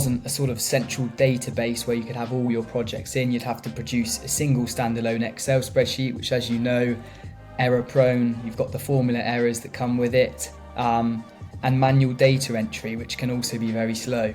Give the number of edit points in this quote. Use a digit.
0